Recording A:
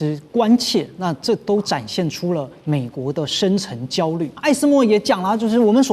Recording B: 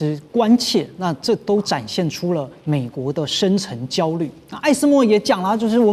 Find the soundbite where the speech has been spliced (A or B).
A